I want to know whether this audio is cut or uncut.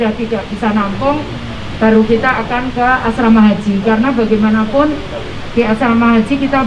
uncut